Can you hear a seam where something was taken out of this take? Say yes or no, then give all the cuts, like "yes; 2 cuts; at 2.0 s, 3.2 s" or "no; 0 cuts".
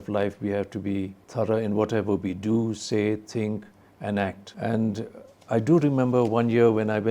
yes; 2 cuts; at 1.2 s, 4.5 s